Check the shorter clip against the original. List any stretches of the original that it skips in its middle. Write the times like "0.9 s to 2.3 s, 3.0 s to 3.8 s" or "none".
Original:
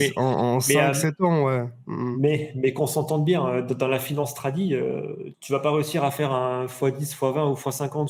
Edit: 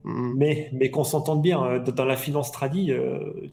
none